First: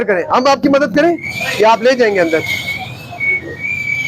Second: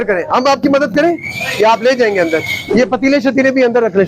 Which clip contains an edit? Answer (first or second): second